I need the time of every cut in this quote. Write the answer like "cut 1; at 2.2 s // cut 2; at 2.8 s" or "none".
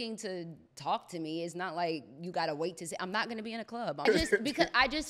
cut 1; at 4.1 s